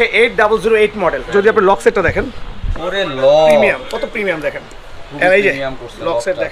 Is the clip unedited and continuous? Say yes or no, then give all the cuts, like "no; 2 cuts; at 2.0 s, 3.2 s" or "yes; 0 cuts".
no; 2 cuts; at 1.2 s, 5.0 s